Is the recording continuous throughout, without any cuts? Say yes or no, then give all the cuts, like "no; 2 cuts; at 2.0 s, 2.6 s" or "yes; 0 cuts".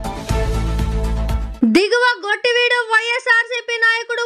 no; 1 cut; at 1.5 s